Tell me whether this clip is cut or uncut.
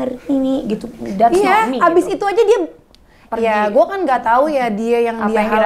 uncut